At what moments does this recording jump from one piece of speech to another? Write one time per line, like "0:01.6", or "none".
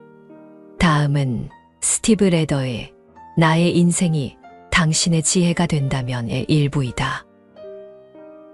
0:07.3